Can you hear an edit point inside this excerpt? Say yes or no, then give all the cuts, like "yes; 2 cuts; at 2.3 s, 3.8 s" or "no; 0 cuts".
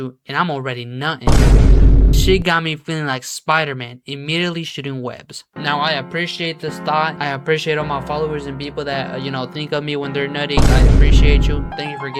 no; 0 cuts